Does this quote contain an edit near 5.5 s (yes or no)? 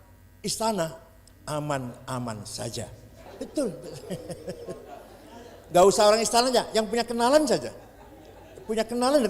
no